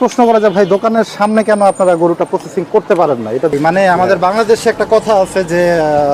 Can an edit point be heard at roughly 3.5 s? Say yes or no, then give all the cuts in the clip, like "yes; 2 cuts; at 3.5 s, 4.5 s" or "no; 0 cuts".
yes; 1 cut; at 3.5 s